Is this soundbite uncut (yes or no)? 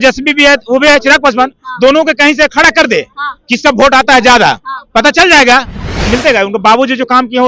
no